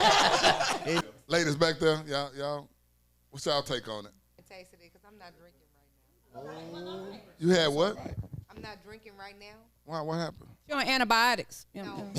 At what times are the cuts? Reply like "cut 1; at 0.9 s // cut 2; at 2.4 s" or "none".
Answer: cut 1; at 1.0 s // cut 2; at 4.3 s